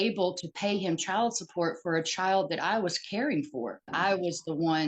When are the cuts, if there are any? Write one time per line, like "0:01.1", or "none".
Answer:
0:03.9